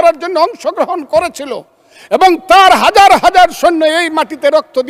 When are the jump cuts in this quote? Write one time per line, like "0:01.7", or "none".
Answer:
none

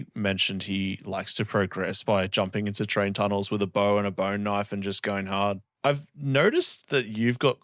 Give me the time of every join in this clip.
0:05.7

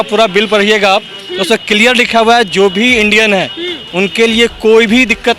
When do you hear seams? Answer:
none

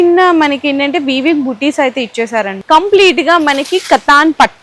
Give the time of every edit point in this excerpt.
0:02.6

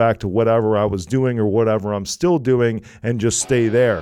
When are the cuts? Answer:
none

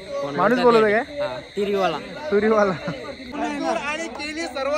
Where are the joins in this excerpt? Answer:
0:03.2

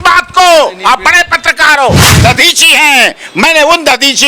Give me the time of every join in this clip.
0:02.1

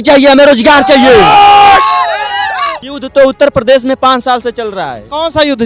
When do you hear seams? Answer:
0:02.9

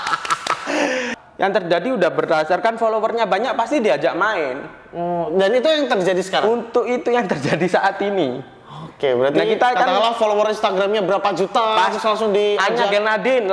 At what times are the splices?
0:01.1

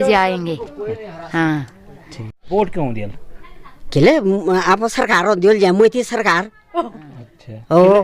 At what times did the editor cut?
0:02.3

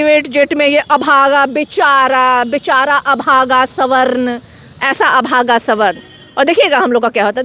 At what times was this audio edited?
none

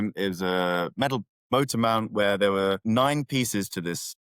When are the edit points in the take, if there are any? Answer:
0:01.4
0:02.8

